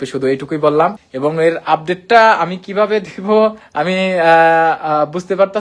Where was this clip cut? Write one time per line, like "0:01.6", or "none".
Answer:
none